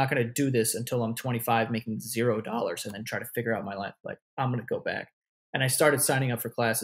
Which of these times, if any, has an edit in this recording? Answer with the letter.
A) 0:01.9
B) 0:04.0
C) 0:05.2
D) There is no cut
D